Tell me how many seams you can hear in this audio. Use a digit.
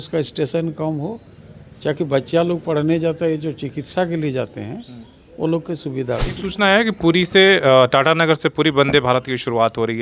1